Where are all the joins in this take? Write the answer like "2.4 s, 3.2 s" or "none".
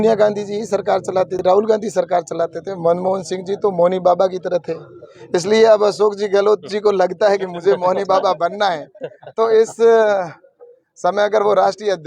1.3 s